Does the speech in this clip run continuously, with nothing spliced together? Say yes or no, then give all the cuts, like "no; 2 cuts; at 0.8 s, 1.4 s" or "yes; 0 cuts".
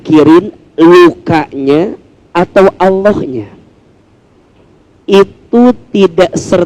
no; 1 cut; at 4.5 s